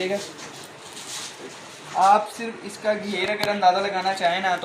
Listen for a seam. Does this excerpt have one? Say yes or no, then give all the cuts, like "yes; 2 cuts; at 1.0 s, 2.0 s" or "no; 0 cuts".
no; 0 cuts